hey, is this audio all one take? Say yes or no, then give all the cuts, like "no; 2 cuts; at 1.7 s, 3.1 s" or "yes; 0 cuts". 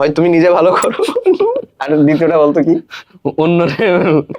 yes; 0 cuts